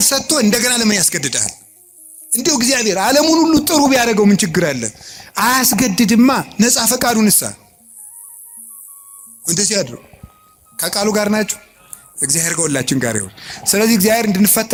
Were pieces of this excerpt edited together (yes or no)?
no